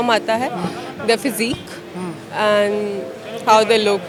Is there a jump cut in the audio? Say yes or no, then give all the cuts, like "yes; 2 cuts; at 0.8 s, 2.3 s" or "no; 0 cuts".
no; 0 cuts